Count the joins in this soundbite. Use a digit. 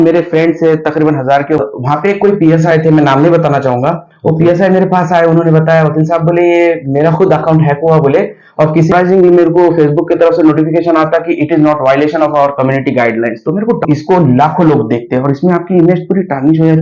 3